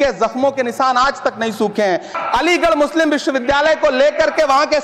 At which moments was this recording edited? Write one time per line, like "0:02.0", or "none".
0:02.1